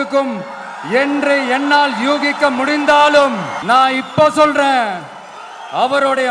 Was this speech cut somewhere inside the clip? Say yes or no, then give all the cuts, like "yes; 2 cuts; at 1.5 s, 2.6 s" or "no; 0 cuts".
yes; 1 cut; at 3.5 s